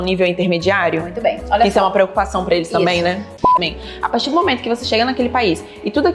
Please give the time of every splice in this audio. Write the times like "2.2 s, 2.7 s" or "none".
3.4 s